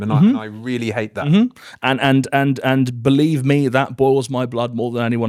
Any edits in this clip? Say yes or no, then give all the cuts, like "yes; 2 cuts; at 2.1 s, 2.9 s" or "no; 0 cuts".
no; 0 cuts